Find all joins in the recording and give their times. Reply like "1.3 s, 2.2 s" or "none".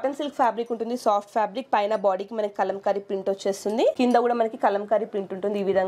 3.9 s